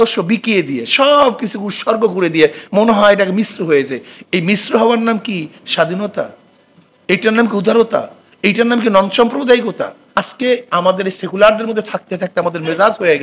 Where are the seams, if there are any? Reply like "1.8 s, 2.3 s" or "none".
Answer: 10.1 s